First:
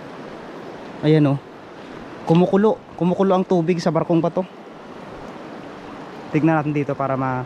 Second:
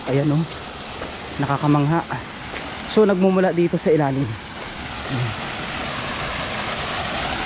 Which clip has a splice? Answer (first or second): first